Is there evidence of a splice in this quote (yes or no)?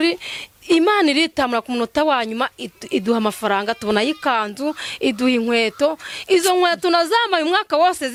no